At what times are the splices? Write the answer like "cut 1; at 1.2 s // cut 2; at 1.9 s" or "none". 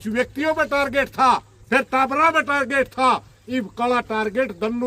none